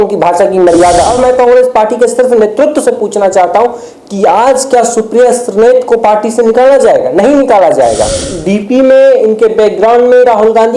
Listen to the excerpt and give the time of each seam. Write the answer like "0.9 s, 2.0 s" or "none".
1.1 s, 8.3 s